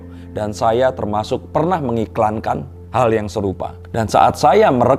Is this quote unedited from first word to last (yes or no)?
yes